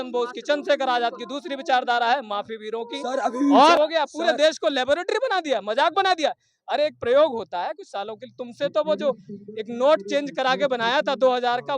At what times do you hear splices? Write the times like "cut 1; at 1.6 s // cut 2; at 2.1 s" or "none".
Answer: cut 1; at 3.8 s